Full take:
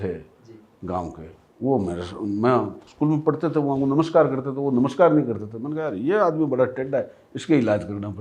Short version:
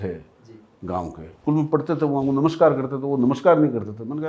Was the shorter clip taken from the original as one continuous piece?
no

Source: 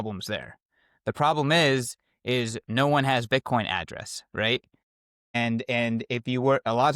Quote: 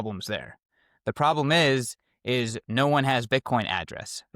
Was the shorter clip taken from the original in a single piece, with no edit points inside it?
yes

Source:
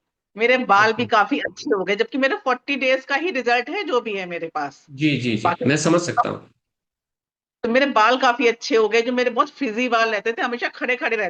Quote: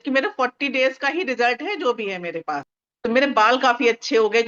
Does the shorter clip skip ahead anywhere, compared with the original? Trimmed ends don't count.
yes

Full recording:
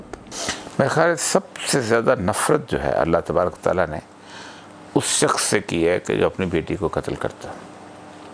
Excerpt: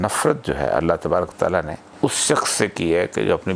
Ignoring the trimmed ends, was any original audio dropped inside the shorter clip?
yes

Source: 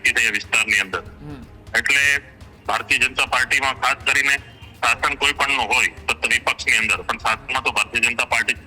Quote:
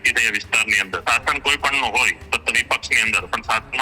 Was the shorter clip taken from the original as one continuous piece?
no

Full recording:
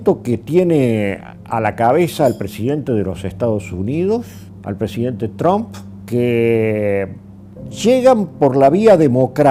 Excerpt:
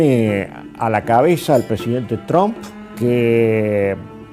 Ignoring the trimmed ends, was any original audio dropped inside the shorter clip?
yes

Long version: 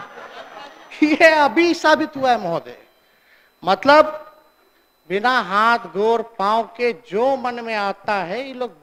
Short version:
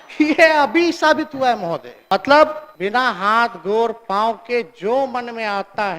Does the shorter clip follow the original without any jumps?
no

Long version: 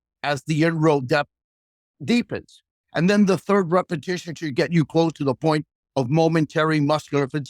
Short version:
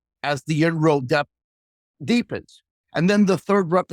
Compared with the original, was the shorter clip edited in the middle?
no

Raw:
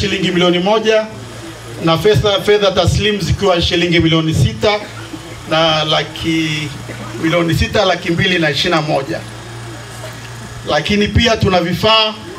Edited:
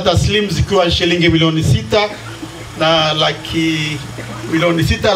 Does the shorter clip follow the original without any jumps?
yes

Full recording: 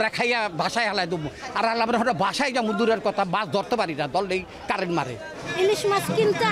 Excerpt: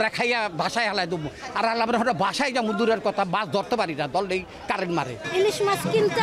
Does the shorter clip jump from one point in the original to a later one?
yes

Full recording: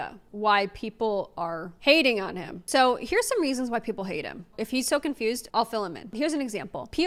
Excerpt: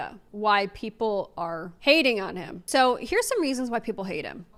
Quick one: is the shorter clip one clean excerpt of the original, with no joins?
yes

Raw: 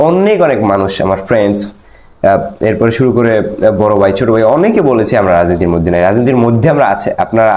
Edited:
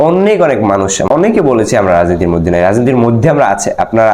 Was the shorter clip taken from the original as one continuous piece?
no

